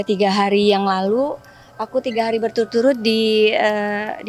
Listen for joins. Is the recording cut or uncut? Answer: uncut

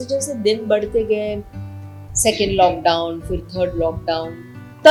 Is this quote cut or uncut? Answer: uncut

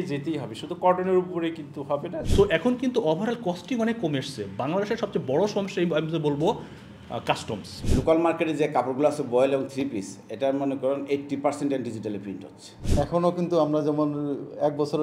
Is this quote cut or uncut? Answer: cut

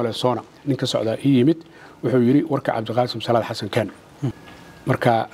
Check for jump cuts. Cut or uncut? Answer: cut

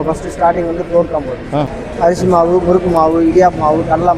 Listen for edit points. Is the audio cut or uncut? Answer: cut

